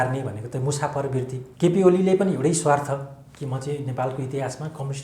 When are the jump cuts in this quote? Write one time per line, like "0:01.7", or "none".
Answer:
0:01.4